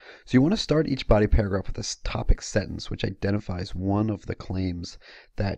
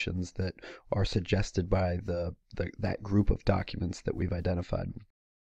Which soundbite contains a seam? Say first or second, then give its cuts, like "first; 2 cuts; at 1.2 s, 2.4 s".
second; 1 cut; at 1.2 s